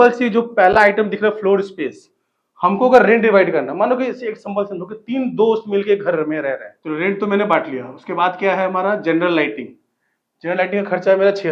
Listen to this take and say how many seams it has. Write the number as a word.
one